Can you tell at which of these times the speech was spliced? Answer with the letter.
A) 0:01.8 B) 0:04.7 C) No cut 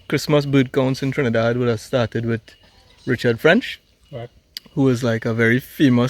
C